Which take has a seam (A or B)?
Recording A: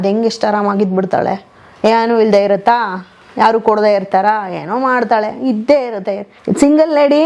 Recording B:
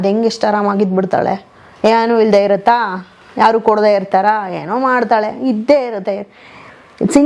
A